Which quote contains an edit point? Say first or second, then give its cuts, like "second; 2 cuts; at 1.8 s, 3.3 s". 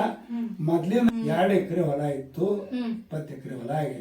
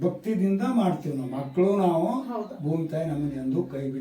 first; 1 cut; at 1.1 s